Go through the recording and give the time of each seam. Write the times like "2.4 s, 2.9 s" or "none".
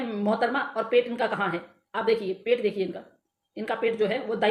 none